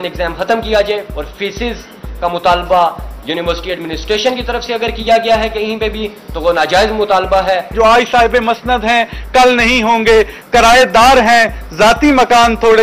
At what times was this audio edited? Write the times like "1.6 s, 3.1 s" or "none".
7.7 s